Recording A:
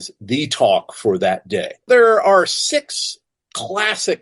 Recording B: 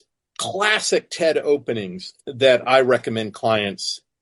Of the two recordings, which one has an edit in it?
A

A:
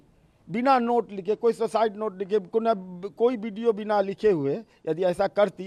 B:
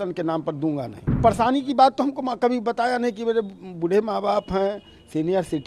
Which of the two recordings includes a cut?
B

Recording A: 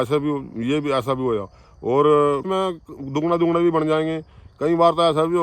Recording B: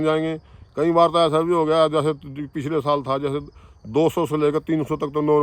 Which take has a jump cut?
A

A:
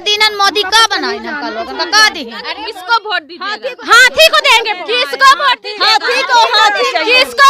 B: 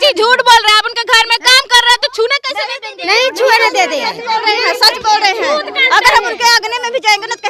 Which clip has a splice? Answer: A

